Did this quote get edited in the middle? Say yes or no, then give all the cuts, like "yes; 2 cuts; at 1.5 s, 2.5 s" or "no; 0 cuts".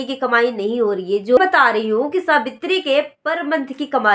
yes; 1 cut; at 1.4 s